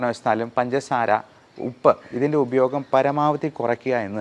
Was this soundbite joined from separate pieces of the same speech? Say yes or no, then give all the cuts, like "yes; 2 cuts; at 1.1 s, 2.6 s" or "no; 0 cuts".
no; 0 cuts